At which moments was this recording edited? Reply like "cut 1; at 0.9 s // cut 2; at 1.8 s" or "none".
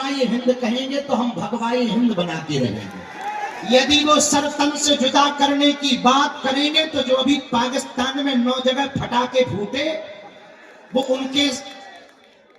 cut 1; at 3.5 s